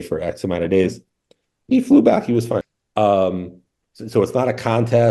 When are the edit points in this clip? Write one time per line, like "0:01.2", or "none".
0:02.8